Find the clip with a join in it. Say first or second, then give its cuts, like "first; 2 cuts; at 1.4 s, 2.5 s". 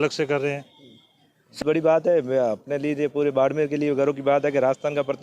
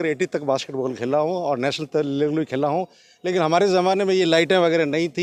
first; 1 cut; at 1.6 s